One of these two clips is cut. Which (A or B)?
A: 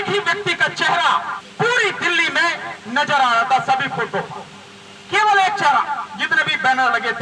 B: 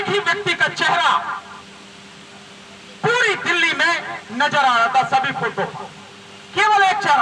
A